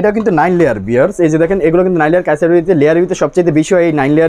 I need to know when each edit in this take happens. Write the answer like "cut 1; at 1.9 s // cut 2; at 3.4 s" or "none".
none